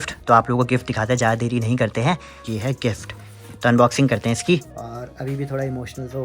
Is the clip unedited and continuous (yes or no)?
no